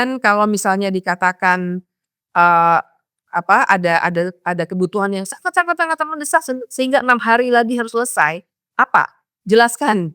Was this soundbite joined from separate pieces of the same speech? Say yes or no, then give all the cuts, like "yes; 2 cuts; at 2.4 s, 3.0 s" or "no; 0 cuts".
no; 0 cuts